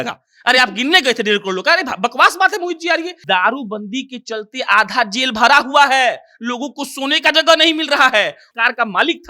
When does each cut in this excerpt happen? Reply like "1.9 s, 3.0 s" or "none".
3.2 s, 8.4 s